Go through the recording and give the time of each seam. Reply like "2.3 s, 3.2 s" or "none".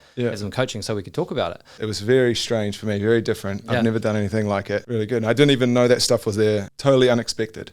1.7 s, 4.9 s, 6.7 s